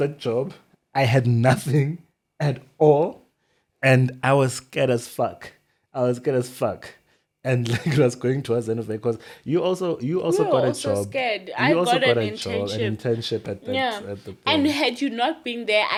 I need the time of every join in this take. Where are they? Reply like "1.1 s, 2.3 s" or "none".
none